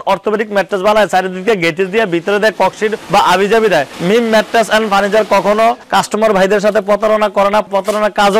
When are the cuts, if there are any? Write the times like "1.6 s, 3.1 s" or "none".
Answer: 3.0 s, 3.9 s